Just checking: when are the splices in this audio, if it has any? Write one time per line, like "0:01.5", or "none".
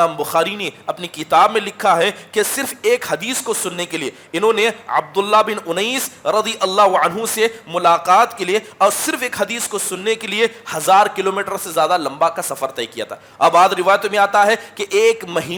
none